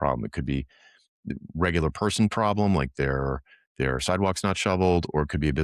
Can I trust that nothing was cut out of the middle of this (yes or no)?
yes